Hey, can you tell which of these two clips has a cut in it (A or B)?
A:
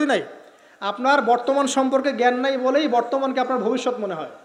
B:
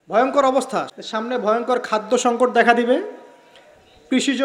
B